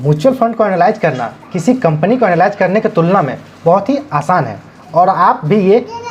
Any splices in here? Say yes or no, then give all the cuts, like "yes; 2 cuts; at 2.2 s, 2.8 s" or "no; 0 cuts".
no; 0 cuts